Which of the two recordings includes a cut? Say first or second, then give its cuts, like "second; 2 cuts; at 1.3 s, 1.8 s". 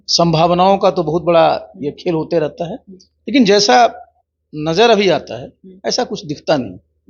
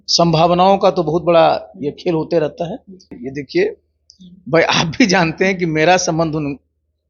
second; 1 cut; at 3.1 s